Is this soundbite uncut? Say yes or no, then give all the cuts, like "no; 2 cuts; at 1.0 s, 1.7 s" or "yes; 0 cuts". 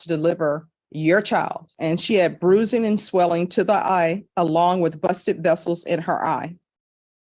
no; 1 cut; at 1.7 s